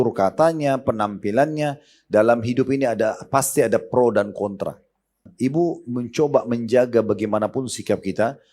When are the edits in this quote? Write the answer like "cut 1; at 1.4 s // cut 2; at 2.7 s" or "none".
cut 1; at 5.3 s